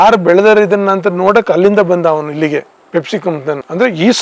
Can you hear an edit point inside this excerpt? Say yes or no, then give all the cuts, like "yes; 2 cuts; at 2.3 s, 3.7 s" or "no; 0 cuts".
yes; 1 cut; at 2.8 s